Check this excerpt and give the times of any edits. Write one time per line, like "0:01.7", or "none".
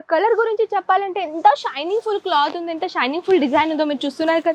none